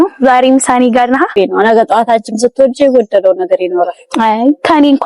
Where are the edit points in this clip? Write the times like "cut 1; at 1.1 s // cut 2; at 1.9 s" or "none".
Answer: cut 1; at 1.3 s